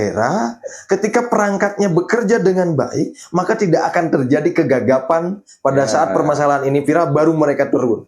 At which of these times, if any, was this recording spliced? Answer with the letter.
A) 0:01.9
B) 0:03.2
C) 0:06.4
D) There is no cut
D